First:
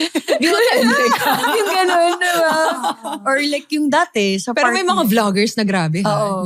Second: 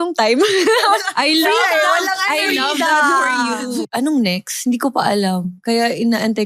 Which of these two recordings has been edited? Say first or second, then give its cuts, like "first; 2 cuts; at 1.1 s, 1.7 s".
second; 1 cut; at 3.9 s